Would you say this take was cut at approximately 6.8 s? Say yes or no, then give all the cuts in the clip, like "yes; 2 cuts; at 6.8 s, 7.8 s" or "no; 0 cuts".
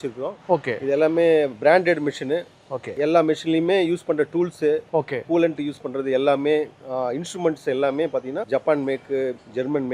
no; 2 cuts; at 2.9 s, 8.4 s